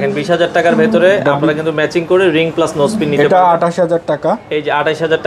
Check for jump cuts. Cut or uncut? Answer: uncut